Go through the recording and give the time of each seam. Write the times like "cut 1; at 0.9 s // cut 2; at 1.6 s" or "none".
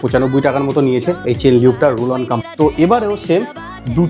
cut 1; at 2.4 s